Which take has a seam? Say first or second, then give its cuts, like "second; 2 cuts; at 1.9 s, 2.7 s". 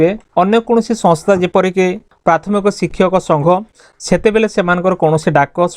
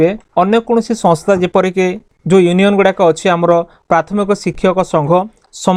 first; 2 cuts; at 2.1 s, 3.8 s